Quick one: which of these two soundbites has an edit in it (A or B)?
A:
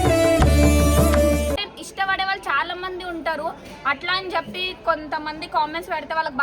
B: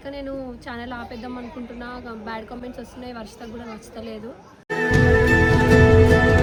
A